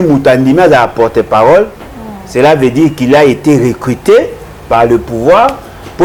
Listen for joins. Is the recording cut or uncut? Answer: uncut